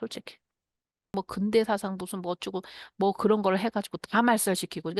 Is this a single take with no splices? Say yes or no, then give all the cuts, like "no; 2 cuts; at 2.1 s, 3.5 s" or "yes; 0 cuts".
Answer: no; 1 cut; at 1.1 s